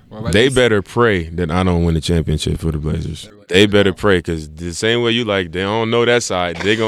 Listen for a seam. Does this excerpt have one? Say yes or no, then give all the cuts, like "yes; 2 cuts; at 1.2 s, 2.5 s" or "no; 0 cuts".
yes; 1 cut; at 3.4 s